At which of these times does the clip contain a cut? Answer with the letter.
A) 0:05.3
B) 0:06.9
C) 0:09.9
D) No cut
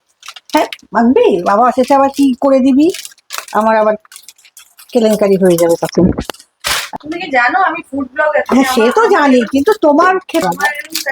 B